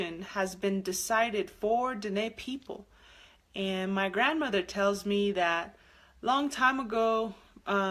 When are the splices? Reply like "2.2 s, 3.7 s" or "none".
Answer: none

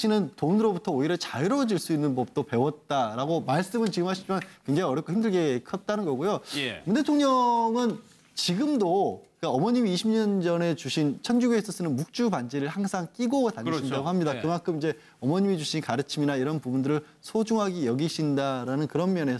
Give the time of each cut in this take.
none

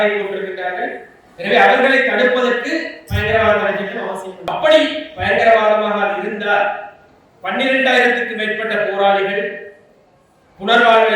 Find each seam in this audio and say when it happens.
4.4 s

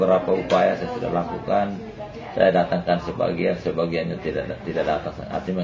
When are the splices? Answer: none

